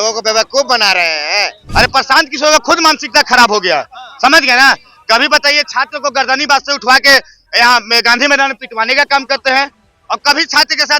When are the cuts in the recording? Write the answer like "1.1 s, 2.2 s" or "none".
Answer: 1.6 s

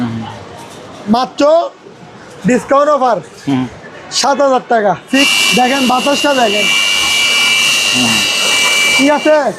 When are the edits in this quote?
5.3 s

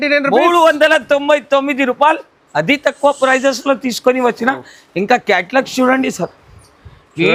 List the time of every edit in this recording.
none

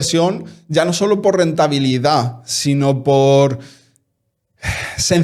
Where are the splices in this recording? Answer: none

